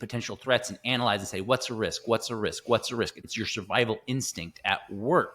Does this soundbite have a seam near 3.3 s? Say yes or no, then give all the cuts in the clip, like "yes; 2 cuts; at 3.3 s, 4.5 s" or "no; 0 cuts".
yes; 1 cut; at 3.3 s